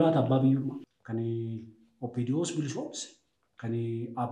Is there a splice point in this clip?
yes; 1 cut; at 0.9 s

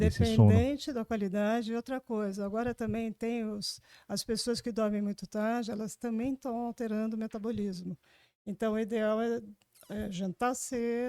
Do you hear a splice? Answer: no; 0 cuts

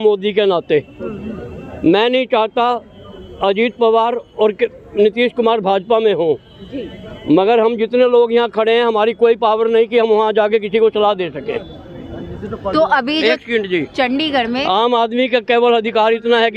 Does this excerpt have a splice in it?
no; 0 cuts

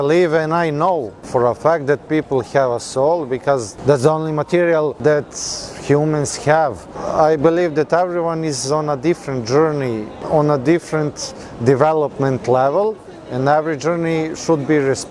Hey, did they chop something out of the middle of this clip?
yes; 5 cuts; at 1.2 s, 3.7 s, 5.0 s, 7.0 s, 10.2 s

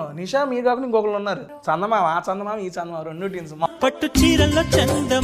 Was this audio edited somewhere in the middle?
yes; 2 cuts; at 1.5 s, 3.7 s

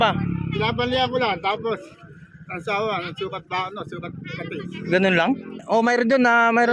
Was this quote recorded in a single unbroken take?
no; 1 cut; at 5.6 s

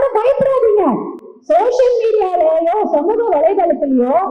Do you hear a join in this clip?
no; 0 cuts

